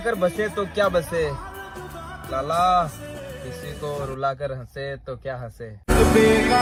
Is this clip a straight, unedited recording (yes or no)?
yes